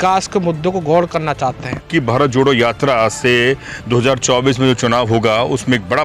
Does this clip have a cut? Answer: yes; 1 cut; at 1.9 s

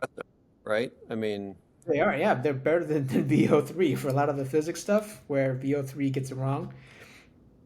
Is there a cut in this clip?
no; 0 cuts

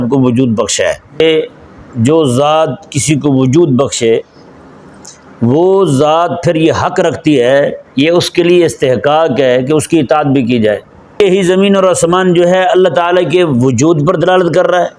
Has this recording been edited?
yes; 2 cuts; at 1.2 s, 11.1 s

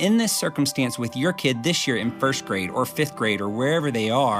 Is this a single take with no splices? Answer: yes; 0 cuts

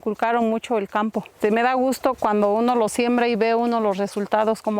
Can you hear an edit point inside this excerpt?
yes; 1 cut; at 1.3 s

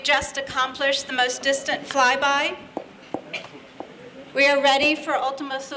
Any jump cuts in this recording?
no; 0 cuts

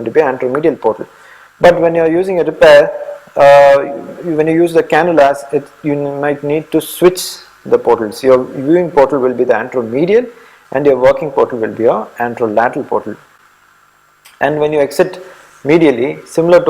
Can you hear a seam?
no; 0 cuts

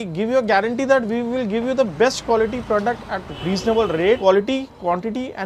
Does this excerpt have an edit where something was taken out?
yes; 2 cuts; at 3.3 s, 4.2 s

